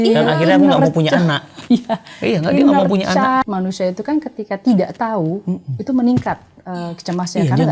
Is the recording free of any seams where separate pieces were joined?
no; 1 cut; at 3.4 s

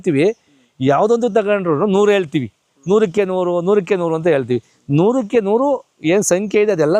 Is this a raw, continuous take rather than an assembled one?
yes; 0 cuts

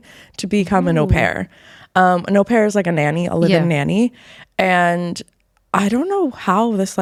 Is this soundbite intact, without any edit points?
yes; 0 cuts

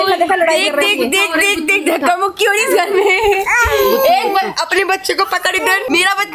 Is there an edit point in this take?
no; 0 cuts

